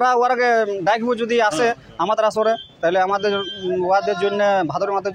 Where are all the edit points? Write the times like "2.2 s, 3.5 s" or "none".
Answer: none